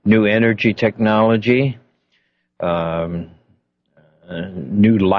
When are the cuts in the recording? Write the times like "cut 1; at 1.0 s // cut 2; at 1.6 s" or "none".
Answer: none

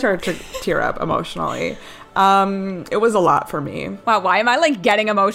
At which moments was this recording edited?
cut 1; at 3.9 s

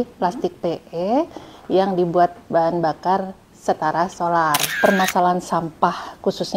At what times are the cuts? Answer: cut 1; at 4.7 s

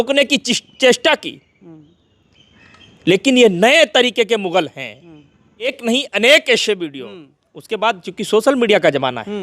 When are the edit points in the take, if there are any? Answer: cut 1; at 5.7 s

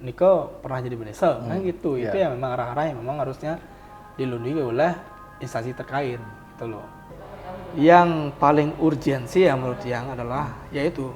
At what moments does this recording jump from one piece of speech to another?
cut 1; at 7.0 s

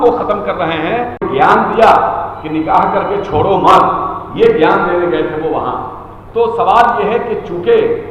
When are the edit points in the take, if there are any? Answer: cut 1; at 1.2 s

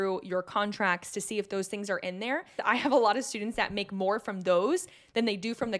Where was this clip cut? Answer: cut 1; at 2.6 s

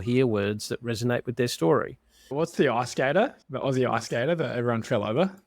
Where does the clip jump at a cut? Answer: cut 1; at 2.3 s

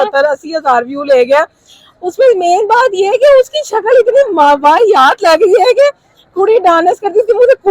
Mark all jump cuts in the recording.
none

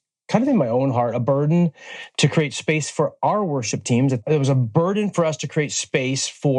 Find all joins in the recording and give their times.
cut 1; at 4.2 s

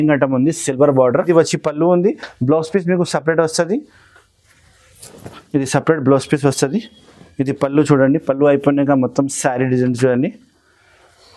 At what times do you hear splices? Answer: cut 1; at 1.2 s

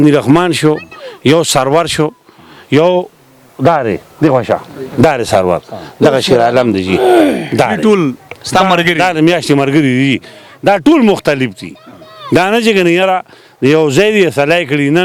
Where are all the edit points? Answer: none

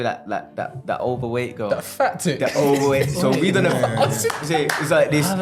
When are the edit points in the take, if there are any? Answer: none

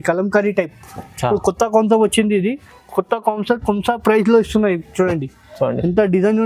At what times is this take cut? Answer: none

